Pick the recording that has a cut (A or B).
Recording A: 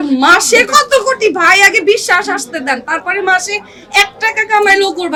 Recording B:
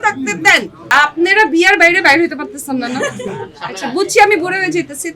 B